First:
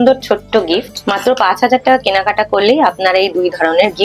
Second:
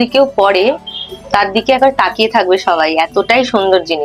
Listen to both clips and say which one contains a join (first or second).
first